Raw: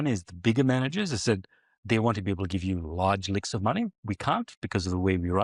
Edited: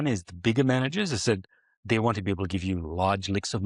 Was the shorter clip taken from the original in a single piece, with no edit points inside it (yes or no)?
yes